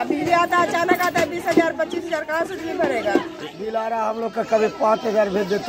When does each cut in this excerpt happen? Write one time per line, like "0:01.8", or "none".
0:03.3